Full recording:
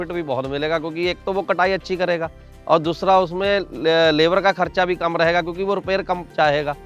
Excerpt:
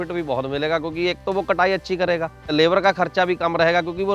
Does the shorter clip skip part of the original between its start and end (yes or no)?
yes